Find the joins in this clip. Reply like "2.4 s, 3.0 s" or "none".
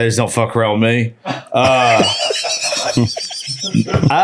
none